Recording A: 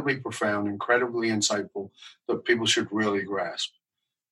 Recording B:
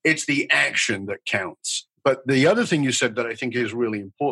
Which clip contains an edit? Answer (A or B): B